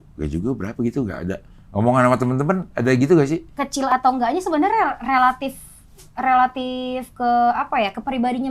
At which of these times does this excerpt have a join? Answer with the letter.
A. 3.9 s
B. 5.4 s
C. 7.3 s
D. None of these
A